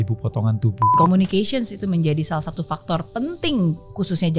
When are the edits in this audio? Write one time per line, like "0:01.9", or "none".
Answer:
0:01.0